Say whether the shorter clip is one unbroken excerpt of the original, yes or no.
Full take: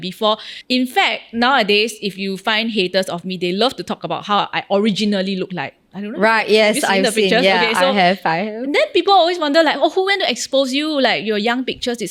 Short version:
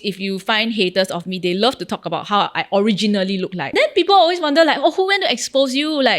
no